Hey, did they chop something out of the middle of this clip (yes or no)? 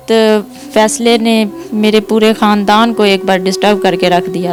no